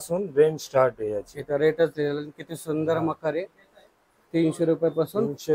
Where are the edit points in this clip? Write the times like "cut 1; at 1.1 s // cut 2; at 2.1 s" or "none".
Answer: none

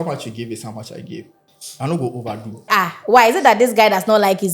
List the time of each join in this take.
cut 1; at 1.5 s // cut 2; at 2.7 s

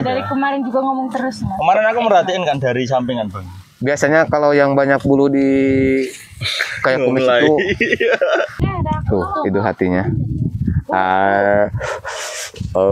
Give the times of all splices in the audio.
cut 1; at 8.6 s

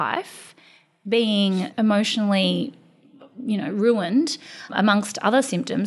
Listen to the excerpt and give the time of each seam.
cut 1; at 1.7 s // cut 2; at 4.7 s

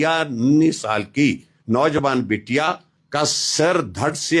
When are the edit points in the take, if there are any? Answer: cut 1; at 2.9 s

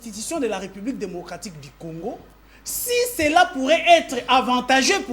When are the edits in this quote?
none

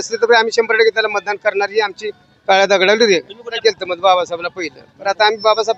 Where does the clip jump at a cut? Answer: cut 1; at 3.6 s

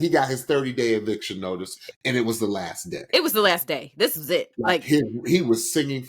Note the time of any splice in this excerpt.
none

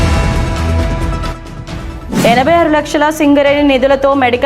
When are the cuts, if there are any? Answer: cut 1; at 0.9 s

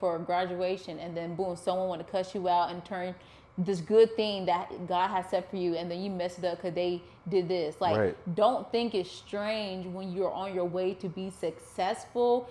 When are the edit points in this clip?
none

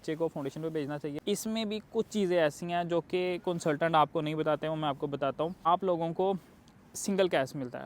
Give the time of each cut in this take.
cut 1; at 1.2 s // cut 2; at 5.7 s

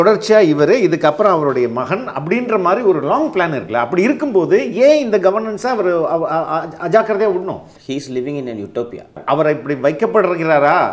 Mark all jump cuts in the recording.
cut 1; at 7.7 s // cut 2; at 9.2 s

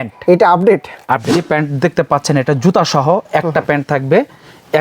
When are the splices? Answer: cut 1; at 1.3 s

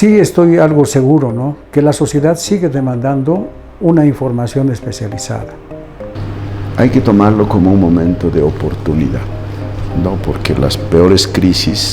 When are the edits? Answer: cut 1; at 6.2 s

